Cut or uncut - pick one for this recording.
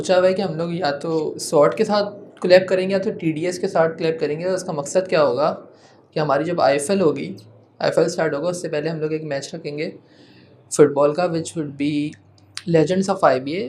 uncut